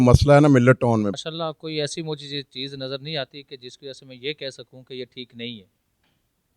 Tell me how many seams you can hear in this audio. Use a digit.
1